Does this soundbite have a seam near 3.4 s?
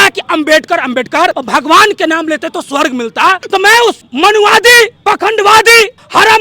yes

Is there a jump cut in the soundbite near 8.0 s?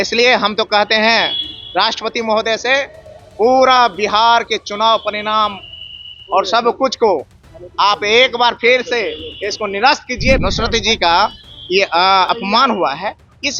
no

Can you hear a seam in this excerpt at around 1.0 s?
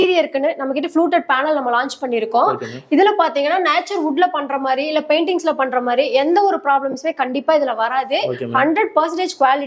no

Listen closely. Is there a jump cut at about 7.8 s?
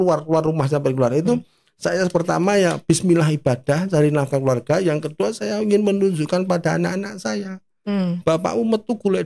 no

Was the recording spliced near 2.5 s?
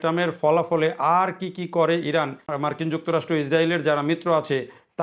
yes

